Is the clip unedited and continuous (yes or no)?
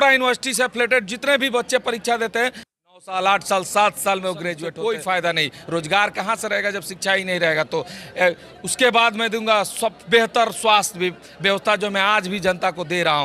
no